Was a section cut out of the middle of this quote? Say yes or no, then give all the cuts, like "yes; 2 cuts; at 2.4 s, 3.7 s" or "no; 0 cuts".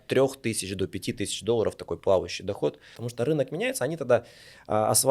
yes; 1 cut; at 3.0 s